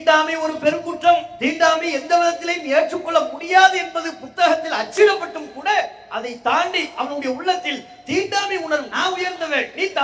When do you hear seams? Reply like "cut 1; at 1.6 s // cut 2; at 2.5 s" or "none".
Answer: cut 1; at 8.9 s